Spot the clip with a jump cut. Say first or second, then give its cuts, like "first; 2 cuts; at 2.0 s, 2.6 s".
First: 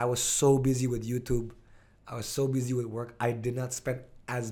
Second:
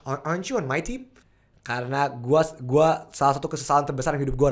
second; 1 cut; at 1.2 s